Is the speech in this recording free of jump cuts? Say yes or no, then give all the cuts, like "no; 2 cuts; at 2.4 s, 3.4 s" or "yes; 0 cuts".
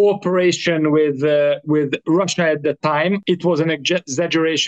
no; 1 cut; at 3.2 s